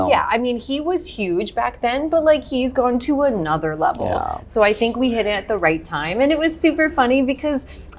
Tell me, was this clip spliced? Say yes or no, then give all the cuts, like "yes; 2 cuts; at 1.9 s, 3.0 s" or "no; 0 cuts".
no; 0 cuts